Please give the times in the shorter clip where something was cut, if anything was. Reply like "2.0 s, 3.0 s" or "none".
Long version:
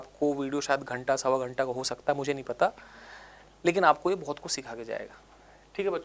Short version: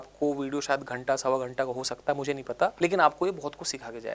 2.7 s